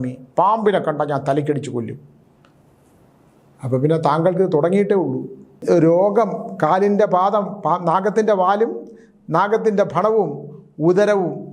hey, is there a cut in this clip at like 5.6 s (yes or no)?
yes